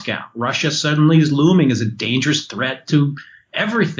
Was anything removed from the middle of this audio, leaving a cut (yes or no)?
no